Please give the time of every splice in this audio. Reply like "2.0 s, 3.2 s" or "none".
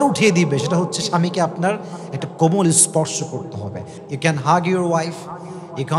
4.0 s